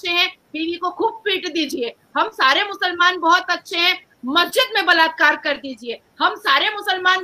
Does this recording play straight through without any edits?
yes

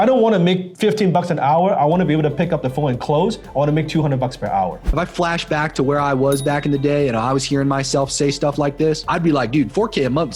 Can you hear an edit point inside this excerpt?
yes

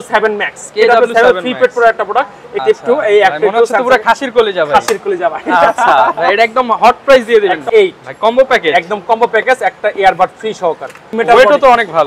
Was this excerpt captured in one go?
no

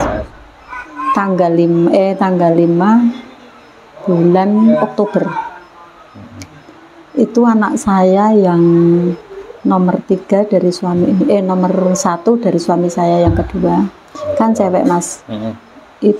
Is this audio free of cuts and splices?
yes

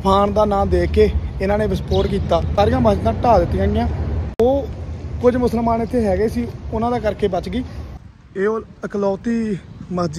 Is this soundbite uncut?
no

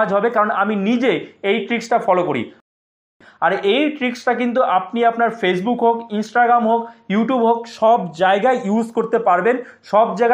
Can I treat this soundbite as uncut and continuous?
no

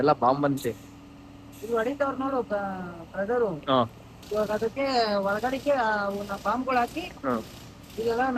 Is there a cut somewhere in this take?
no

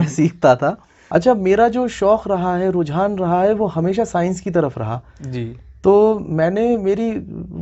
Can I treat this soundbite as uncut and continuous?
no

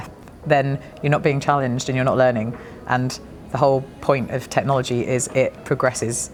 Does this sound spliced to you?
no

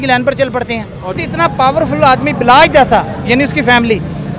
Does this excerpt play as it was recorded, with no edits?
no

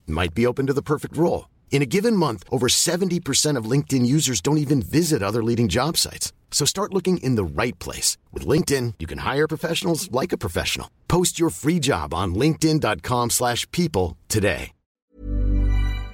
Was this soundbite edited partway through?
yes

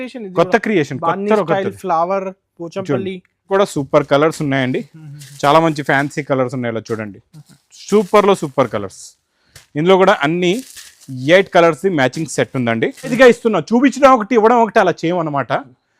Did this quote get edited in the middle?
yes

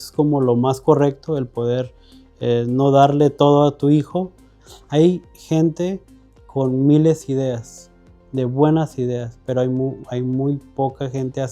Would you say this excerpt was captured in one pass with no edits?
no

